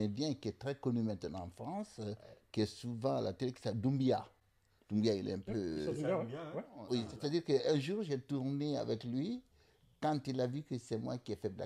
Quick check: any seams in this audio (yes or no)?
yes